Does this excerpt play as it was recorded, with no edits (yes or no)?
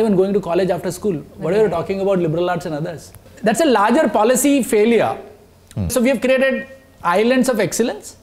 no